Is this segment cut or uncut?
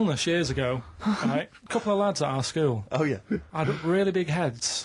cut